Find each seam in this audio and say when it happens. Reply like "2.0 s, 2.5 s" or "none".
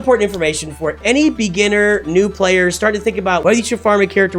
1.0 s, 3.4 s